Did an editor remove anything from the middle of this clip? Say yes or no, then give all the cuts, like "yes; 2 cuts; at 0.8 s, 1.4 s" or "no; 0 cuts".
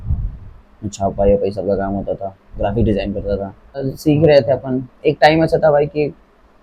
yes; 1 cut; at 3.9 s